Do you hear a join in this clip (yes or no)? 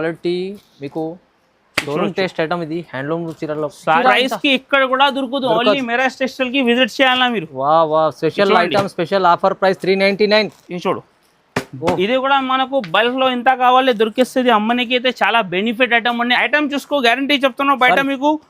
yes